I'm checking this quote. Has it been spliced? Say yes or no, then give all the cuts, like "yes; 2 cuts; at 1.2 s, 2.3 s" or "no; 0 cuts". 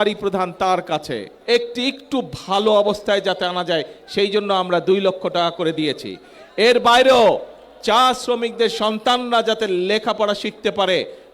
yes; 1 cut; at 1.3 s